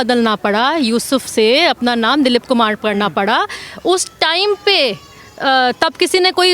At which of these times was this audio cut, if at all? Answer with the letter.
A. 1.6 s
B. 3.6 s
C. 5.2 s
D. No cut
D